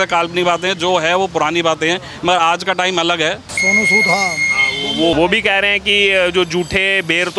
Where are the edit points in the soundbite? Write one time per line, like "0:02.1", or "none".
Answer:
0:03.5
0:05.1